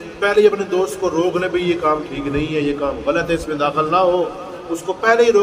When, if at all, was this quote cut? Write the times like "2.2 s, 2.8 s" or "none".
none